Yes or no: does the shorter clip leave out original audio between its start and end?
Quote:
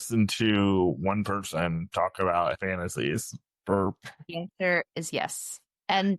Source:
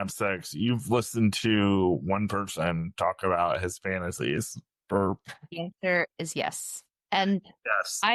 yes